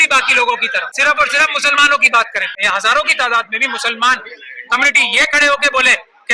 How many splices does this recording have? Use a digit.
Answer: 2